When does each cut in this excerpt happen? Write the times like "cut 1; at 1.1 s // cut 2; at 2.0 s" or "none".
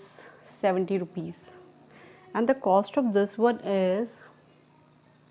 none